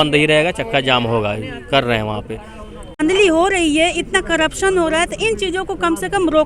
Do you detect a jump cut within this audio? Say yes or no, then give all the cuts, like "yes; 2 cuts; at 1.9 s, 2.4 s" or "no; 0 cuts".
yes; 1 cut; at 3.0 s